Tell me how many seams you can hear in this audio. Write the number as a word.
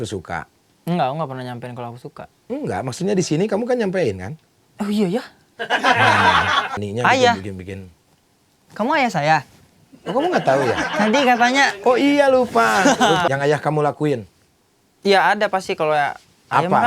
two